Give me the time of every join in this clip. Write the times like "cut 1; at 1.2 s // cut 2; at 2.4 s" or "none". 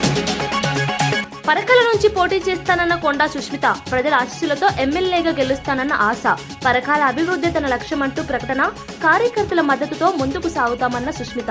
none